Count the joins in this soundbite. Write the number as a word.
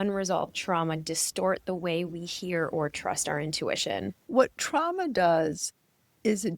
one